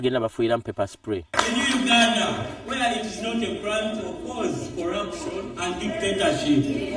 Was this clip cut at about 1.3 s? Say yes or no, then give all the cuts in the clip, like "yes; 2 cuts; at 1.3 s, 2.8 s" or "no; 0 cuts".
yes; 1 cut; at 1.3 s